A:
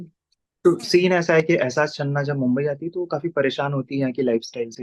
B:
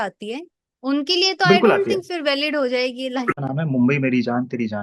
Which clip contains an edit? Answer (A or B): B